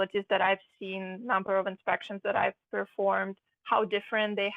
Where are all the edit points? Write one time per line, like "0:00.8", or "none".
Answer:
none